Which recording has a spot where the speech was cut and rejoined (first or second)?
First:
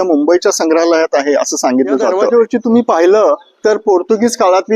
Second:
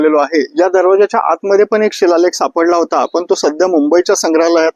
first